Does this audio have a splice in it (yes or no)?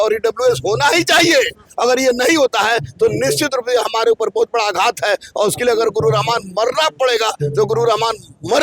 no